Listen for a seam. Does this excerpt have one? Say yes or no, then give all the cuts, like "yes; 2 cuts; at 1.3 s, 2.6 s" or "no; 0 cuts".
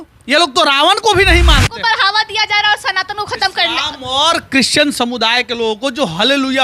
yes; 1 cut; at 1.7 s